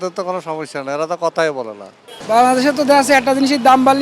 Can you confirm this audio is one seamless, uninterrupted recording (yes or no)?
no